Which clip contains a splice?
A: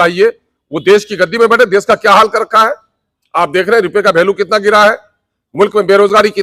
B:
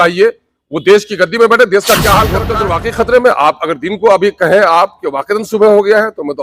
B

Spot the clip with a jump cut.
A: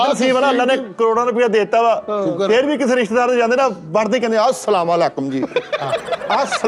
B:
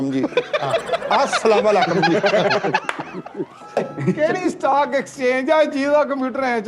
B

